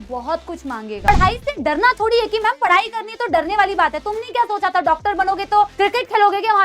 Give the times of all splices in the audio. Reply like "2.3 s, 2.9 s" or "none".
1.1 s